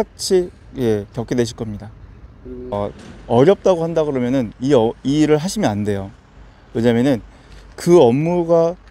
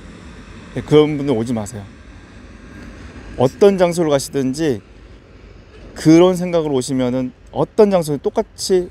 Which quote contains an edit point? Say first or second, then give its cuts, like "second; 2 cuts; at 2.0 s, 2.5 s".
first; 1 cut; at 2.7 s